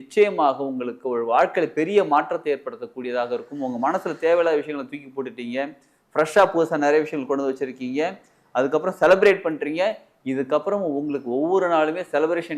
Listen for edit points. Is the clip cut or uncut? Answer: uncut